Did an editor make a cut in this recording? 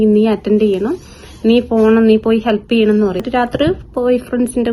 yes; 1 cut; at 3.2 s

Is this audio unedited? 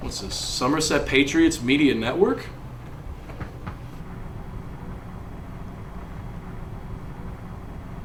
yes; 0 cuts

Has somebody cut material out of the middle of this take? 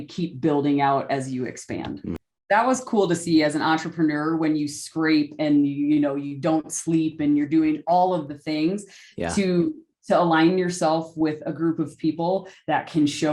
yes; 1 cut; at 2.2 s

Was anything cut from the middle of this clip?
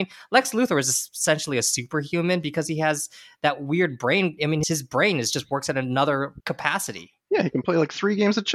yes; 1 cut; at 6.4 s

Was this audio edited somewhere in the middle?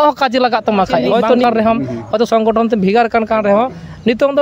yes; 1 cut; at 1.4 s

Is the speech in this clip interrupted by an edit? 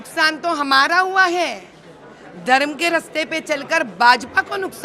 no; 0 cuts

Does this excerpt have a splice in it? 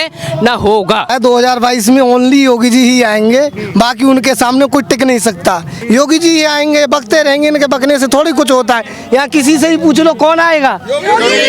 yes; 2 cuts; at 1.1 s, 5.7 s

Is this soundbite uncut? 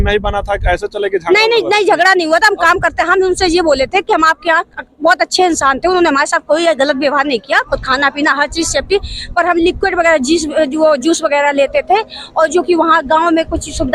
yes; 0 cuts

